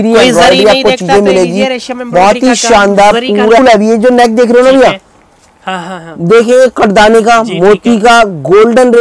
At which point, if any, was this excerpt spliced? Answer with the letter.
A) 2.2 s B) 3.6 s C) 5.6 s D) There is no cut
B